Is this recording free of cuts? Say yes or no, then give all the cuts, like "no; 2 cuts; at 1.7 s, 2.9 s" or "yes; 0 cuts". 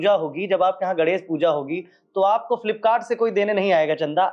yes; 0 cuts